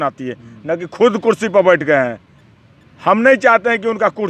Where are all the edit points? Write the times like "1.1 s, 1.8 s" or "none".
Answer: none